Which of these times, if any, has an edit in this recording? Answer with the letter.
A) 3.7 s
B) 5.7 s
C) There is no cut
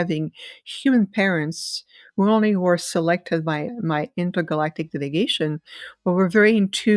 A